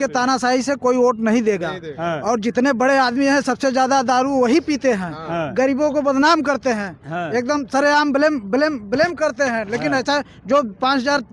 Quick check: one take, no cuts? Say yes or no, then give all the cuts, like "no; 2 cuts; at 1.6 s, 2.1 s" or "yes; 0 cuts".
yes; 0 cuts